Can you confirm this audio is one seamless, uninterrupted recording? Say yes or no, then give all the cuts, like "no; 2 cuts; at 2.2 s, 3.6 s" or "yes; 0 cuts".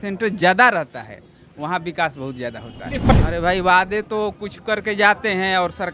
no; 1 cut; at 3.1 s